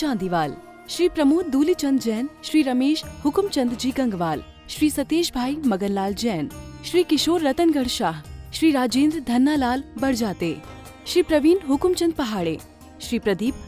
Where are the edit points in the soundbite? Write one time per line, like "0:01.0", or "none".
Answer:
none